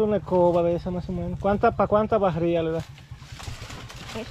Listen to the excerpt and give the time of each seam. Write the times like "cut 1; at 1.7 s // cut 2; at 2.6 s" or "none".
cut 1; at 3.3 s